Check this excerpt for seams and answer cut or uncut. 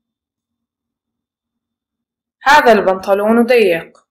uncut